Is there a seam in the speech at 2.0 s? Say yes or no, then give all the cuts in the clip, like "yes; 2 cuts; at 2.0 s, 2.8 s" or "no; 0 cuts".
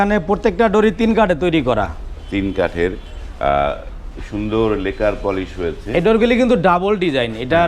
no; 0 cuts